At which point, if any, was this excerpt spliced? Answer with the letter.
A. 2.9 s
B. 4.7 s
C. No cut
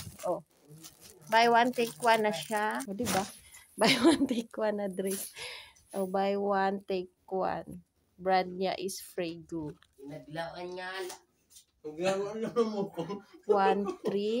A